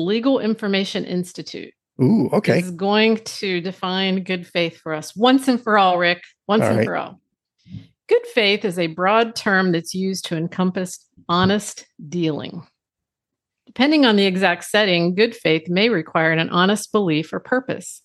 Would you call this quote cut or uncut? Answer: uncut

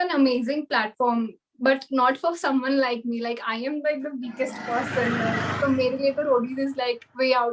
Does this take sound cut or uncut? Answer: uncut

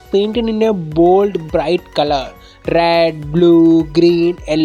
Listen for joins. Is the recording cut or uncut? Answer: uncut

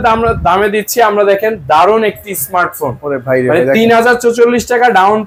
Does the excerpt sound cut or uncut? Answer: uncut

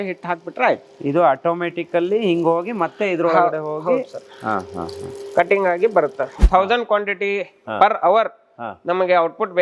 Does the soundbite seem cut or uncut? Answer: cut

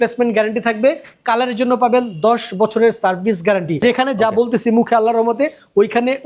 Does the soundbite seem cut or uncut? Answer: cut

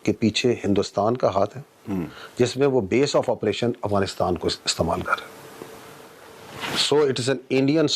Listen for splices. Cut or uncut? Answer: uncut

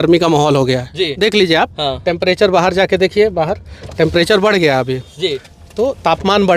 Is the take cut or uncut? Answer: uncut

